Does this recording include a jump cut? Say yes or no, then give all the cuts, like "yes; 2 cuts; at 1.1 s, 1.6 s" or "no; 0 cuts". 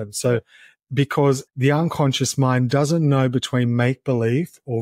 yes; 1 cut; at 1.5 s